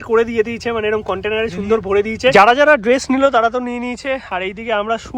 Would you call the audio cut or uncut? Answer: cut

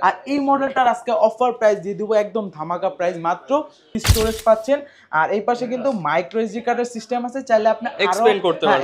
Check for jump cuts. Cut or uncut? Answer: cut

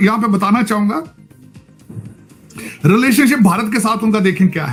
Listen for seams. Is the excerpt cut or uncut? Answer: uncut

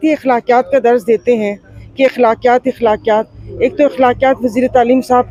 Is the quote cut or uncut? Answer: uncut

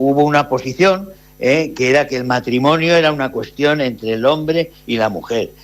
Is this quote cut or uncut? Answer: uncut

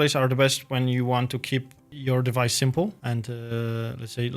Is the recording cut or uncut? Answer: uncut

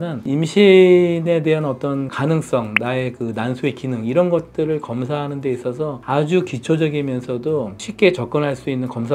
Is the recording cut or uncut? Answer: uncut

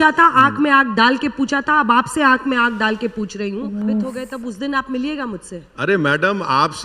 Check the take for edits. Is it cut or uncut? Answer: cut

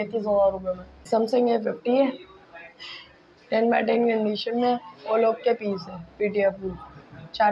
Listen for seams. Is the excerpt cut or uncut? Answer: cut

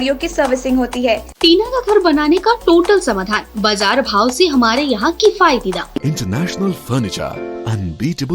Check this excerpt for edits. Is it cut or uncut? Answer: cut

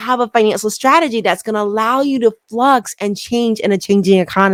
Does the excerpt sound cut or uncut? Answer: uncut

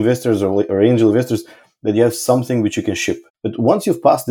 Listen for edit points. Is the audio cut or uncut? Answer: cut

